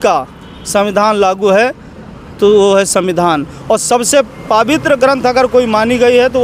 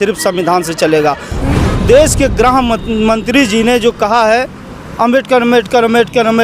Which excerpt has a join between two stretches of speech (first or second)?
second